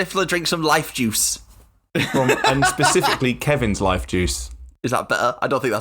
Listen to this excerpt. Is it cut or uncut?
cut